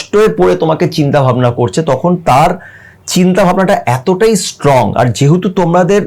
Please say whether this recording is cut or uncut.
uncut